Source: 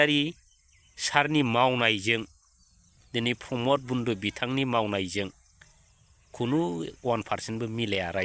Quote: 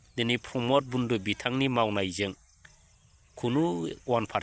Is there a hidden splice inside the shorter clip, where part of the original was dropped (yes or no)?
no